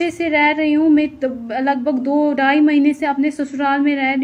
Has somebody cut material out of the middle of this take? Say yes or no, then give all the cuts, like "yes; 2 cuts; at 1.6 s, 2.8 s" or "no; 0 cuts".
no; 0 cuts